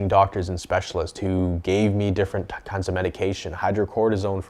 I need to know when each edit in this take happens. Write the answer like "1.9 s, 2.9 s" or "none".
none